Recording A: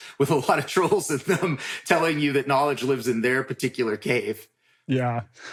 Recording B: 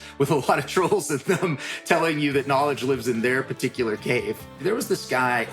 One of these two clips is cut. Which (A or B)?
B